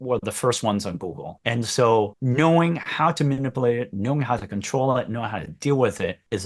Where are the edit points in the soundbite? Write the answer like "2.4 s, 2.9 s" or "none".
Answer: none